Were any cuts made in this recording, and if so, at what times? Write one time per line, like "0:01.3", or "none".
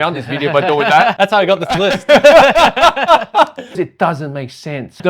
0:03.8